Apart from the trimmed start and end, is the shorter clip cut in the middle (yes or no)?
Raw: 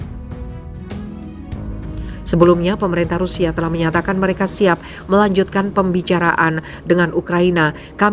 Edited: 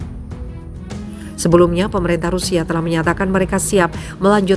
yes